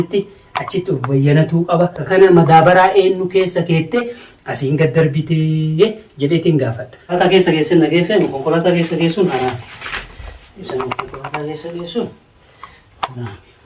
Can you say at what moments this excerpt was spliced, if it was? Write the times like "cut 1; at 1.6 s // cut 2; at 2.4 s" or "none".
cut 1; at 2.0 s // cut 2; at 7.2 s

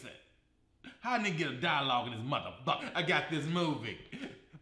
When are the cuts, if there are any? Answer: cut 1; at 2.8 s

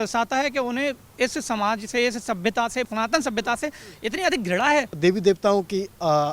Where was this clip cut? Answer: cut 1; at 2.9 s // cut 2; at 4.9 s

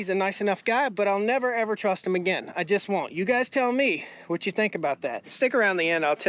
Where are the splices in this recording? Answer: cut 1; at 5.3 s

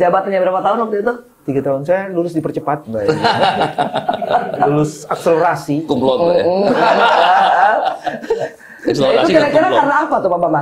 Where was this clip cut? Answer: none

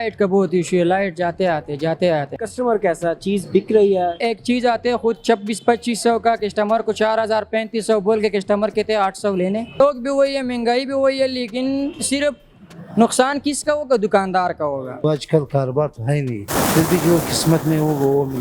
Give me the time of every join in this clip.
cut 1; at 2.4 s // cut 2; at 4.2 s // cut 3; at 9.8 s // cut 4; at 15.0 s // cut 5; at 16.4 s

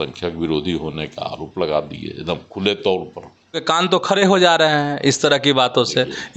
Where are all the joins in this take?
cut 1; at 3.6 s

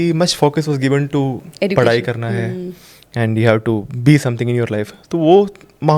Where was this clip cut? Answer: none

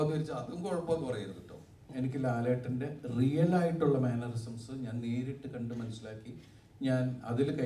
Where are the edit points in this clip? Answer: cut 1; at 1.9 s

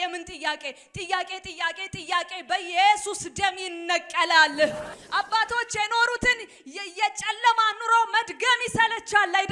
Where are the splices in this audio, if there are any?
cut 1; at 4.9 s

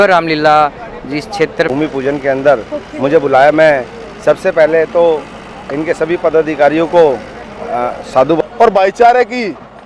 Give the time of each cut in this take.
cut 1; at 1.7 s // cut 2; at 8.4 s

